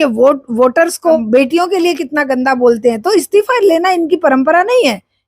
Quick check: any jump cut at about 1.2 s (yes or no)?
yes